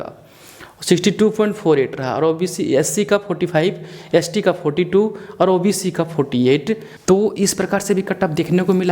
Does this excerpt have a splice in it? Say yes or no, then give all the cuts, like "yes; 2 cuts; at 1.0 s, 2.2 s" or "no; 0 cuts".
yes; 1 cut; at 6.9 s